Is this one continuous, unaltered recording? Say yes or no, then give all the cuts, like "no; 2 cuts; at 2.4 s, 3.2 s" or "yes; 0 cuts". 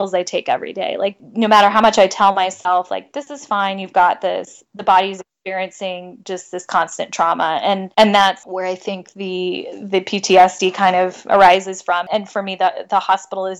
no; 4 cuts; at 1.1 s, 7.9 s, 8.4 s, 12.1 s